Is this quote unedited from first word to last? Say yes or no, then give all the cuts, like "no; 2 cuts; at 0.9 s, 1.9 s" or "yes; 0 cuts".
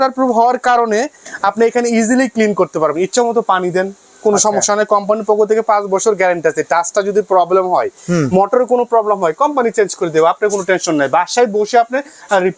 yes; 0 cuts